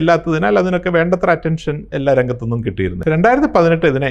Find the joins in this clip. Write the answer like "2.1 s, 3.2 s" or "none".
1.8 s, 3.0 s